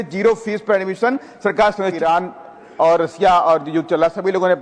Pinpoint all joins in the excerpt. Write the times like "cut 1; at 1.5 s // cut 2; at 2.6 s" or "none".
cut 1; at 2.0 s